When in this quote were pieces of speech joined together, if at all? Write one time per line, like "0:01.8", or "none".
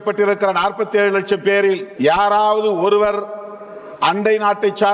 0:01.9

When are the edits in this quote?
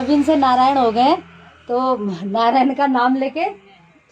none

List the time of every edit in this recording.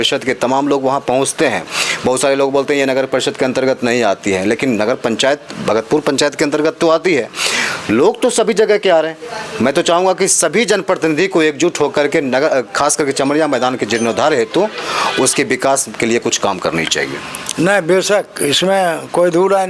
none

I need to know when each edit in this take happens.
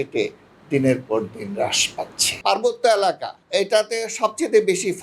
0:02.3

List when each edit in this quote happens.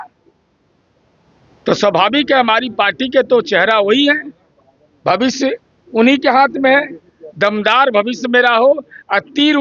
none

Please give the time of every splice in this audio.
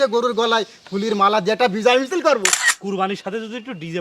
0:02.5

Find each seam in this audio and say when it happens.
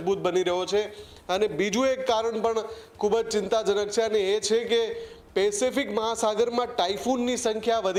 none

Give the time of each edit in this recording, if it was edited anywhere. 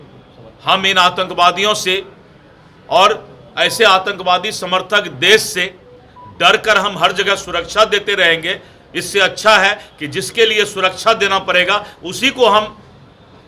none

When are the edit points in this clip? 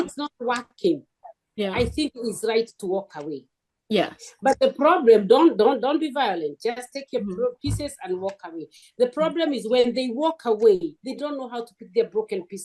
none

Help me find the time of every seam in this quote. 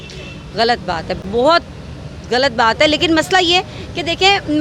none

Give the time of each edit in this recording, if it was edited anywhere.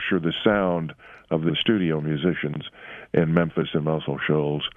0:01.5

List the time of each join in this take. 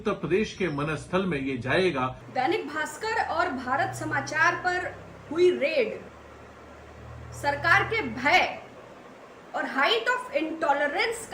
0:02.2

